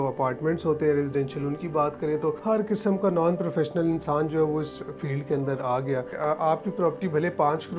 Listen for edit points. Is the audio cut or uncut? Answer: cut